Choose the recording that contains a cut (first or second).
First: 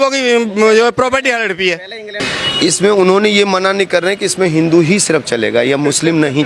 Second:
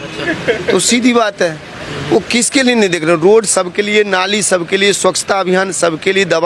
first